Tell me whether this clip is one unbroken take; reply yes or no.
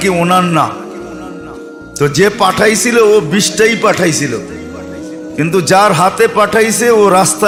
yes